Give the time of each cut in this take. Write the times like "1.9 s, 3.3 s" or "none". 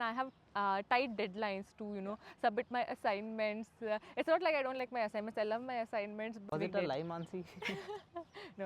6.4 s